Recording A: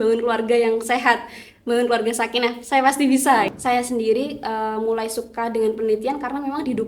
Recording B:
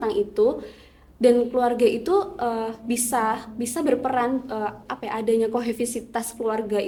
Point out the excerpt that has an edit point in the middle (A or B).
A